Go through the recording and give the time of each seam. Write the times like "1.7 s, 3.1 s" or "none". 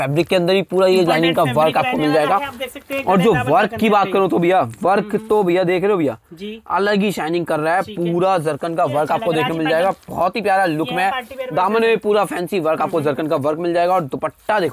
none

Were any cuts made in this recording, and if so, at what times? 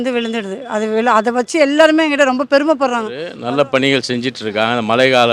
3.3 s

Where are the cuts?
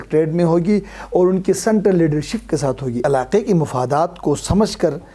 3.0 s

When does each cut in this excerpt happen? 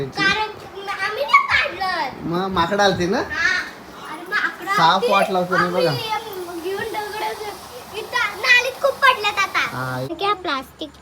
10.1 s

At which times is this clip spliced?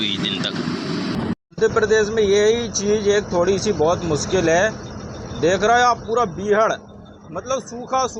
1.4 s

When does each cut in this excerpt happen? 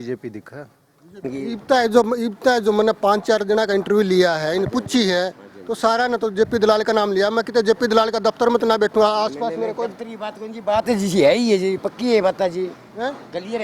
1.2 s

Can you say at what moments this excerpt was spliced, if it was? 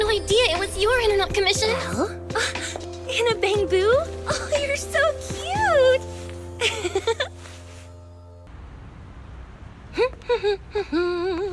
8.5 s

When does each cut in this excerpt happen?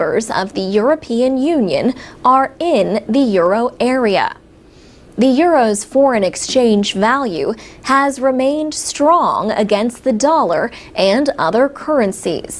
none

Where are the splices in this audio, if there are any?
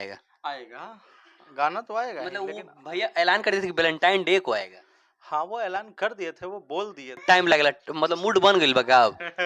7.2 s

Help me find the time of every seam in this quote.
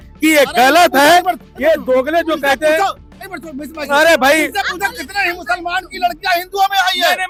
none

